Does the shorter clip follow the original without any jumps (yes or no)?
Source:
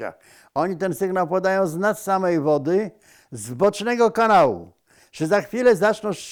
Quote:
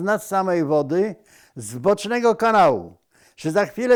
yes